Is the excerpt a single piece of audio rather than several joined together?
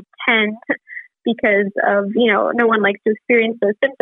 yes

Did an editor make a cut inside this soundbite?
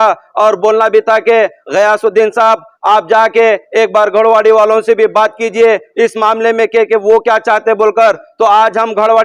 no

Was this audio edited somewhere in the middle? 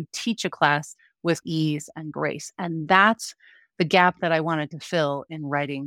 yes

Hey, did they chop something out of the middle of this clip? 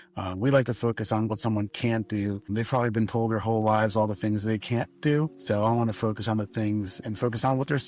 yes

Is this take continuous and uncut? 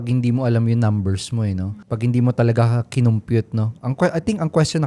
yes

